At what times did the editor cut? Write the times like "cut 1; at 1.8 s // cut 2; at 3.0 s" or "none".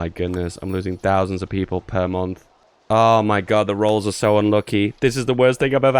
none